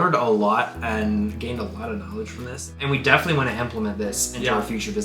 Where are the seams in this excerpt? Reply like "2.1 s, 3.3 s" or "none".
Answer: 2.8 s

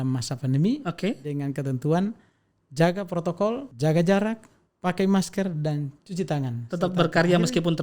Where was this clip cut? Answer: 3.7 s

